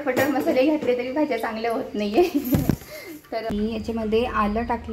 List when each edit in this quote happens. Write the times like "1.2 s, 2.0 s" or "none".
3.5 s